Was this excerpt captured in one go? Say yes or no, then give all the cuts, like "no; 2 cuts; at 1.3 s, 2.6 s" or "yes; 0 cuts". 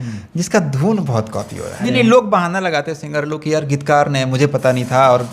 no; 1 cut; at 1.8 s